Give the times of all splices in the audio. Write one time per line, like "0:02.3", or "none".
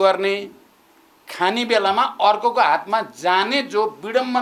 none